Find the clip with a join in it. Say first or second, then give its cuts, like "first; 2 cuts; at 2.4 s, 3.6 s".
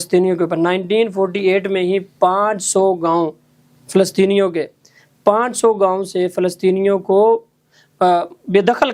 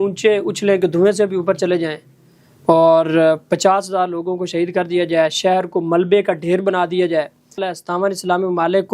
second; 1 cut; at 7.7 s